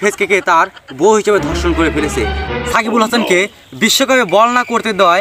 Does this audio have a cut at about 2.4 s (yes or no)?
yes